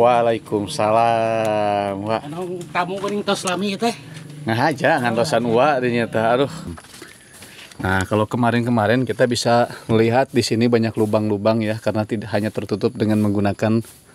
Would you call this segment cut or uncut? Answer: cut